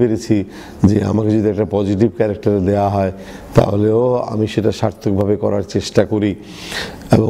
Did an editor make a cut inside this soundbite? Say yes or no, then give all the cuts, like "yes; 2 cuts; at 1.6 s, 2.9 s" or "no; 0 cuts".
no; 0 cuts